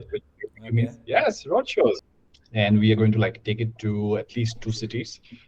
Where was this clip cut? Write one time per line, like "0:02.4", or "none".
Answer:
0:02.0